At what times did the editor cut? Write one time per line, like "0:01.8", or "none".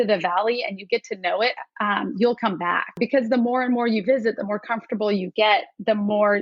0:02.9